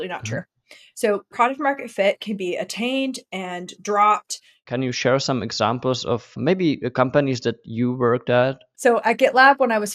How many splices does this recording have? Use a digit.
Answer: 3